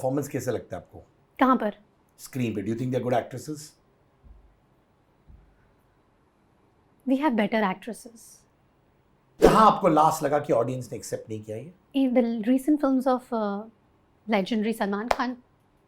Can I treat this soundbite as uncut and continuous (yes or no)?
no